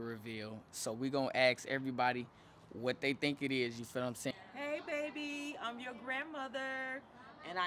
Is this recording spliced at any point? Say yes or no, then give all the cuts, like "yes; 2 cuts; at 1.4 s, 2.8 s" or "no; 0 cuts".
yes; 1 cut; at 4.3 s